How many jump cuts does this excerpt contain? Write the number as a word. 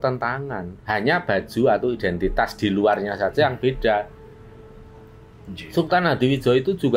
zero